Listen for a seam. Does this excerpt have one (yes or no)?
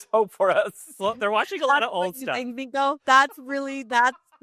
no